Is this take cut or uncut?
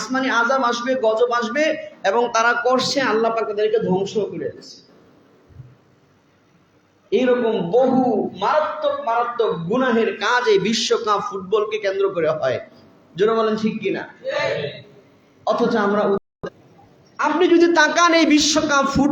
cut